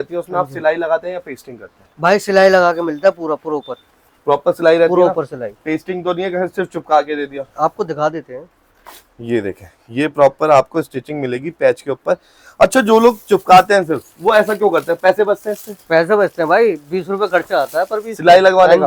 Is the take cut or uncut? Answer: uncut